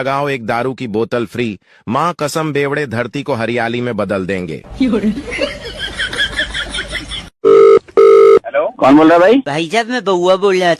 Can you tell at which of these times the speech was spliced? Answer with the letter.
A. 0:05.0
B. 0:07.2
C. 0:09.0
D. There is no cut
B